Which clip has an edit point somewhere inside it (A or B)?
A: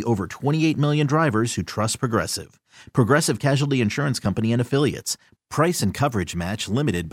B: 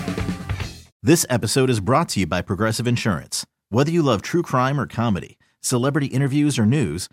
B